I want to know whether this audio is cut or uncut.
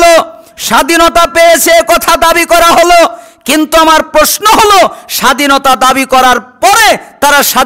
uncut